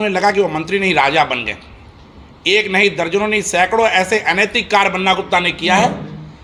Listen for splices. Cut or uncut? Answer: uncut